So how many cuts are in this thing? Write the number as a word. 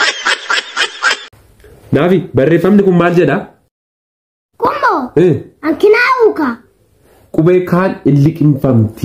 zero